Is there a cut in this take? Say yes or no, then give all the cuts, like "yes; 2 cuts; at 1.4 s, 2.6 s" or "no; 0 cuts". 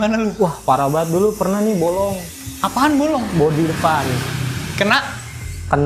no; 0 cuts